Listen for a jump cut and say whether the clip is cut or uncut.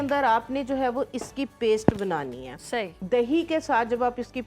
uncut